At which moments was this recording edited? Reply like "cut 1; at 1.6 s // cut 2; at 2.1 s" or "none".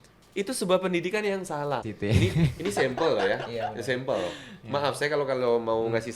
cut 1; at 1.9 s

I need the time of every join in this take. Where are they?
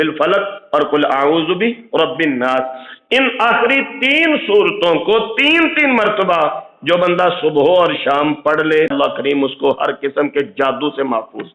cut 1; at 8.9 s

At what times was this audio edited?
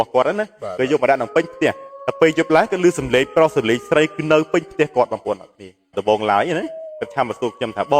cut 1; at 6.0 s

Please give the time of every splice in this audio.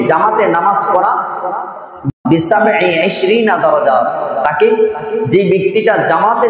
cut 1; at 2.0 s

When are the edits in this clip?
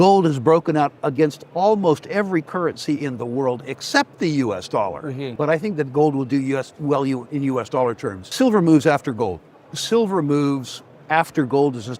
cut 1; at 5.2 s // cut 2; at 8.2 s

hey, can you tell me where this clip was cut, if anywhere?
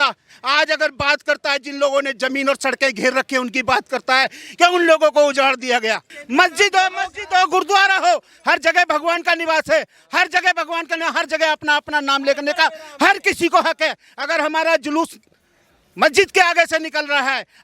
cut 1; at 6.2 s

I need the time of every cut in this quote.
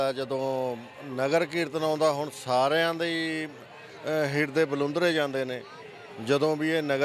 none

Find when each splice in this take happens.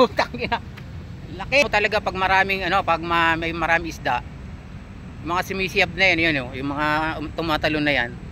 cut 1; at 1.6 s

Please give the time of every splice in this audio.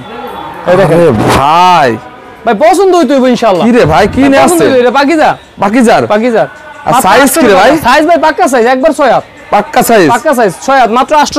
none

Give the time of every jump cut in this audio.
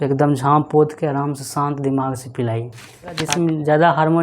cut 1; at 3.2 s

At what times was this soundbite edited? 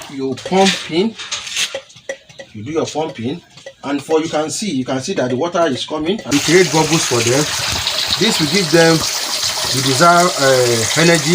cut 1; at 6.2 s

